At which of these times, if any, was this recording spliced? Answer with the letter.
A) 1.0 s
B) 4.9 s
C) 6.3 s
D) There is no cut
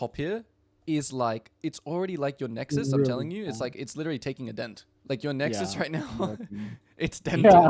B